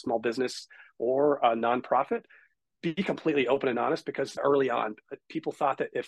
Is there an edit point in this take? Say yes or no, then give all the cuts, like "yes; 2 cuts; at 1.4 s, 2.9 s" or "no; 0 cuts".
yes; 1 cut; at 4.4 s